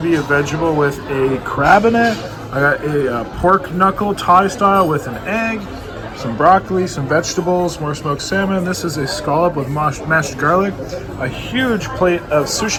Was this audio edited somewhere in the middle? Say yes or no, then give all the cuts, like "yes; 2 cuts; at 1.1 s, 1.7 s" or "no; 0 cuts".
no; 0 cuts